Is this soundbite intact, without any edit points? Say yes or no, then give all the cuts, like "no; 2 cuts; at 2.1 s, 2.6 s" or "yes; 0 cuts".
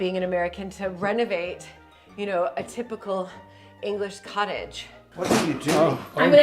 no; 1 cut; at 5.0 s